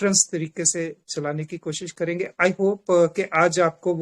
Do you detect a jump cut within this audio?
no; 0 cuts

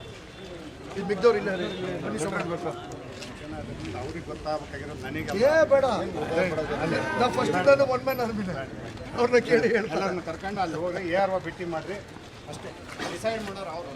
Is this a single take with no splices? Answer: yes; 0 cuts

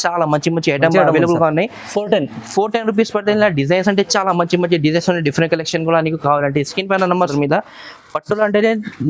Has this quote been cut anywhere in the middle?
yes; 1 cut; at 7.3 s

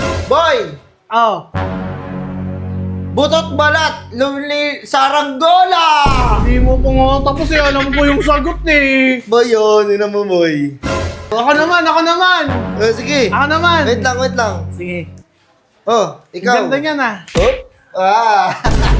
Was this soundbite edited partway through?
yes; 1 cut; at 11.3 s

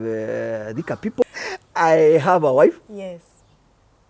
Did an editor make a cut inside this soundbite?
yes; 1 cut; at 1.2 s

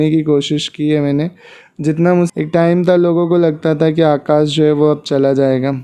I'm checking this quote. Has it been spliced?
yes; 1 cut; at 2.3 s

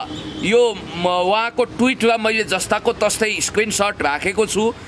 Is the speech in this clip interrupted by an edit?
no; 0 cuts

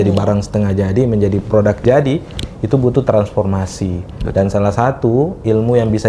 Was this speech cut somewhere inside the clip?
no; 0 cuts

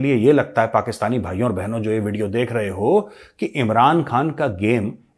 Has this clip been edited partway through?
no; 0 cuts

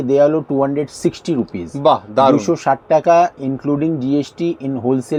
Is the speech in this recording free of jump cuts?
yes; 0 cuts

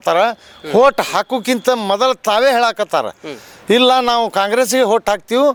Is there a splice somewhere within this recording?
no; 0 cuts

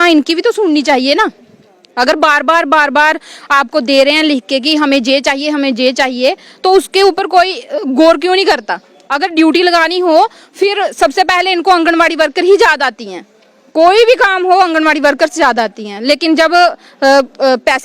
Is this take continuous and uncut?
no; 1 cut; at 9.0 s

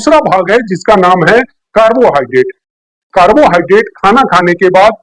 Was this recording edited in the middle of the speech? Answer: no; 0 cuts

